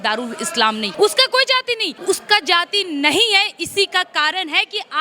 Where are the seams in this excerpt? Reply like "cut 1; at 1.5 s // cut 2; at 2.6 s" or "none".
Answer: cut 1; at 0.9 s // cut 2; at 1.9 s